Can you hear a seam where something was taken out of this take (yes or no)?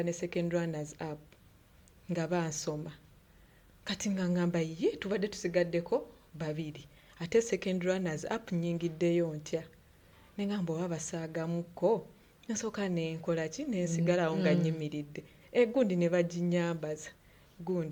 no